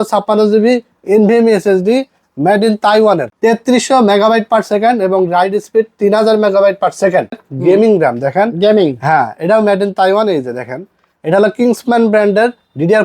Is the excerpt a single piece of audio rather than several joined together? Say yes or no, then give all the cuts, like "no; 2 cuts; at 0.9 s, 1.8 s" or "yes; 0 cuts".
no; 2 cuts; at 3.3 s, 7.4 s